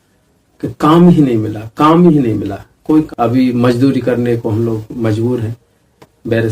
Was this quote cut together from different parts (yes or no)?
yes